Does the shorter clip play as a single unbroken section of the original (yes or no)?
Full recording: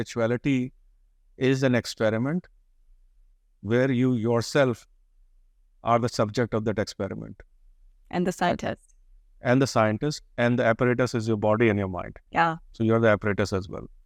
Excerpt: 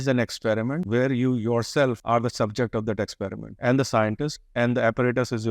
no